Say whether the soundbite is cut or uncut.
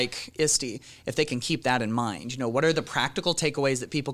uncut